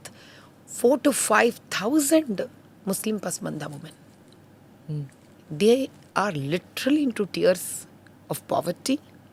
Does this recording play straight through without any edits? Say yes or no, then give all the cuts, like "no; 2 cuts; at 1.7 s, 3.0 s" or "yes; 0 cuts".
yes; 0 cuts